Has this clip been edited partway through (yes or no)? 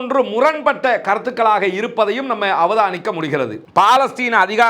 yes